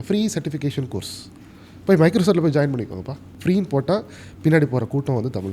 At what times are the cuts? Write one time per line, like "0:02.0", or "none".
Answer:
0:03.2